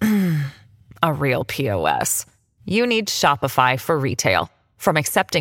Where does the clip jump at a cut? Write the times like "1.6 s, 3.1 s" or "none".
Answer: none